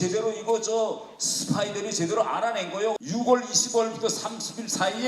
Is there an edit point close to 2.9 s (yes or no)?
yes